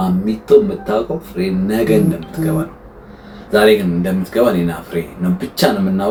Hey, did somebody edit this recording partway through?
no; 0 cuts

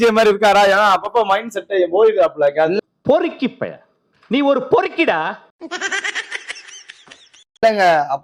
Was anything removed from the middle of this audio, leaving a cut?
no; 0 cuts

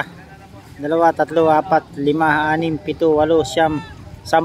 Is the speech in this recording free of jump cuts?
yes; 0 cuts

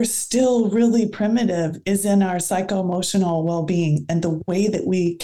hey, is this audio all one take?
yes; 0 cuts

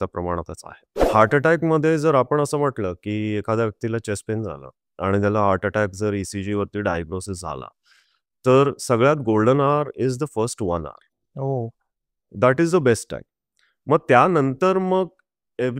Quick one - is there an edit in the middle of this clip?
yes; 2 cuts; at 1.0 s, 12.3 s

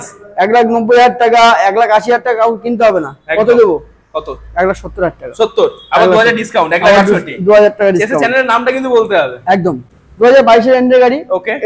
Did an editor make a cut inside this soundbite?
yes; 1 cut; at 9.9 s

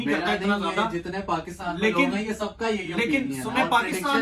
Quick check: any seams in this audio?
no; 0 cuts

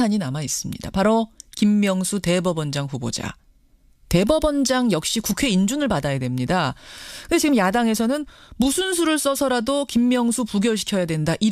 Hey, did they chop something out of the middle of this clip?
no; 0 cuts

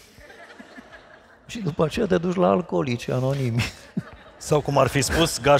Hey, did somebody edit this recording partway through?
no; 0 cuts

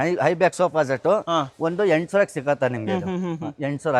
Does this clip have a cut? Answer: no; 0 cuts

